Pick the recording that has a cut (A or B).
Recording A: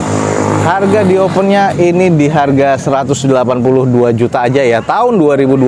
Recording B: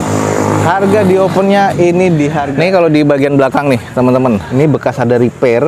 B